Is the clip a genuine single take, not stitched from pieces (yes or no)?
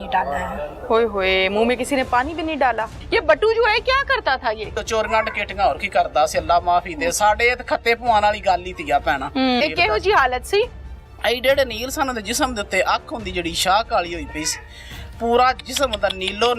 no